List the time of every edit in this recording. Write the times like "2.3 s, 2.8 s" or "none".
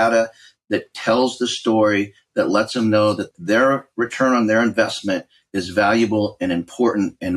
3.3 s